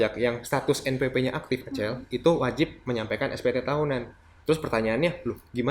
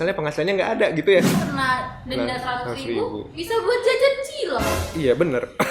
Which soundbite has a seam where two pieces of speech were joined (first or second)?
second